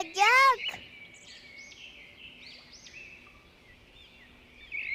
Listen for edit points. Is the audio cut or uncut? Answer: cut